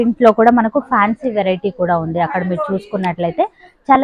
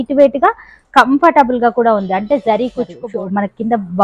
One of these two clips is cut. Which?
second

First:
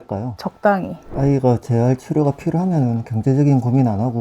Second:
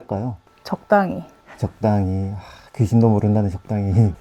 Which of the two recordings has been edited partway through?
first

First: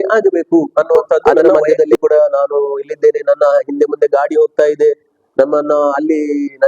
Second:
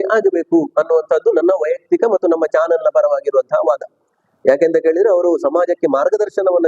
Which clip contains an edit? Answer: first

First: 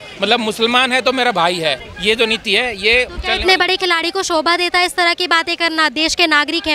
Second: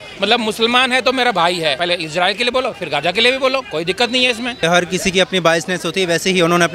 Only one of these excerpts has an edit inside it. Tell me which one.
second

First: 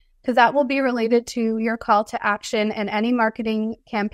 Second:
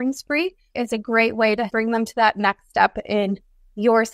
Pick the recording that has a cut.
second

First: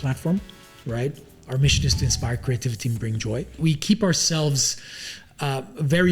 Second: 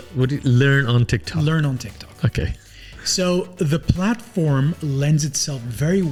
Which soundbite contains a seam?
first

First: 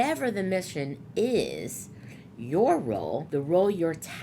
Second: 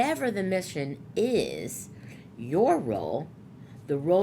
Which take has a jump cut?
first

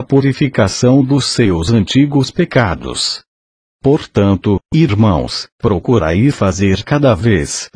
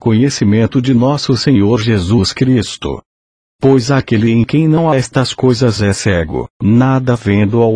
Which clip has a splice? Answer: second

